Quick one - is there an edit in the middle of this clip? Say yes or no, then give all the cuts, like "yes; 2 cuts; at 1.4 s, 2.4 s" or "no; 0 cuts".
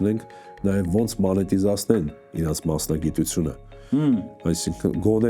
no; 0 cuts